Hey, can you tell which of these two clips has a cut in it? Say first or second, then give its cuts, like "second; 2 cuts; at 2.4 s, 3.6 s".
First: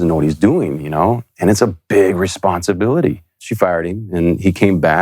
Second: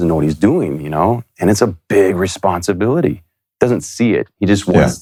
first; 1 cut; at 3.4 s